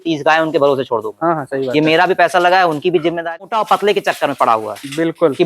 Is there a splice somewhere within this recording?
yes; 1 cut; at 3.3 s

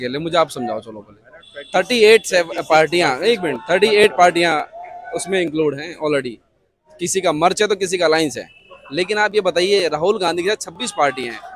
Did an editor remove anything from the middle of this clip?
no; 0 cuts

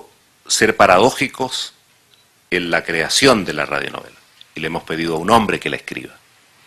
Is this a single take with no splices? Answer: yes; 0 cuts

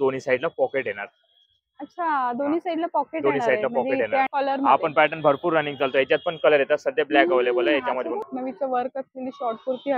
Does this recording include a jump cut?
yes; 2 cuts; at 4.3 s, 8.3 s

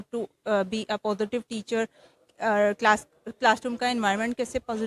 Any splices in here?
no; 0 cuts

